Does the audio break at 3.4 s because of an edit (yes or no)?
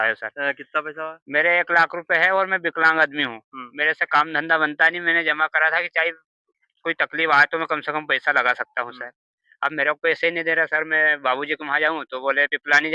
no